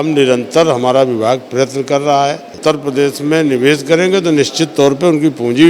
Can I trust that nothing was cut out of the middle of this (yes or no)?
no